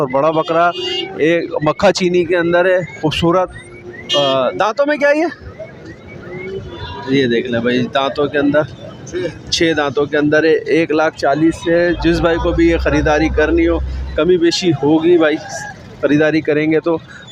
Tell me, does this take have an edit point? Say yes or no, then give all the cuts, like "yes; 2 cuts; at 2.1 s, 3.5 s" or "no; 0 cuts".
no; 0 cuts